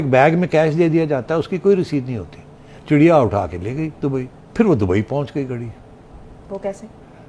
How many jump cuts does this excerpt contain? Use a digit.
2